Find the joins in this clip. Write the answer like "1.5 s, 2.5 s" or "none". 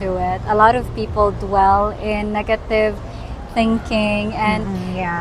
none